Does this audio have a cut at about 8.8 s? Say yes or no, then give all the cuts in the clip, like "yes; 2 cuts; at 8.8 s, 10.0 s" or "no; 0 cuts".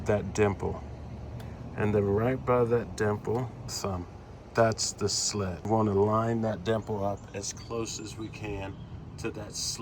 no; 2 cuts; at 3.8 s, 5.6 s